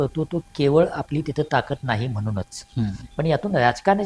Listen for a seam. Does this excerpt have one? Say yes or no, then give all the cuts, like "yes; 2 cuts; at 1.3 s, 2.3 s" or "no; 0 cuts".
yes; 1 cut; at 3.0 s